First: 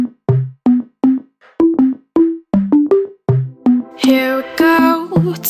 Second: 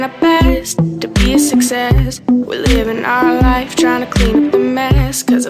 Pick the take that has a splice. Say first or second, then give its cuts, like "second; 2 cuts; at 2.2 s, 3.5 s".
first; 1 cut; at 1.6 s